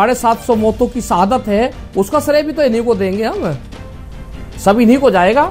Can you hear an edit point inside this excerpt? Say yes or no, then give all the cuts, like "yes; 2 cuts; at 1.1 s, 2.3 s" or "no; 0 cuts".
no; 0 cuts